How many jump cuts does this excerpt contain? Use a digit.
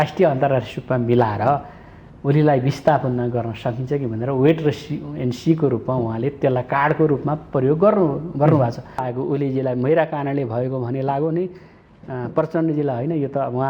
1